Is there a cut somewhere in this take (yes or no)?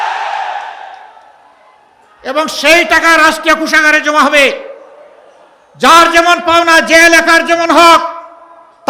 no